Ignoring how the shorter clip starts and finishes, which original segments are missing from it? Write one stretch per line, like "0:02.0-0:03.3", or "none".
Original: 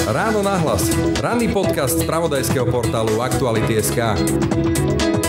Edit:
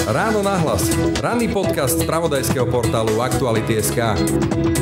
none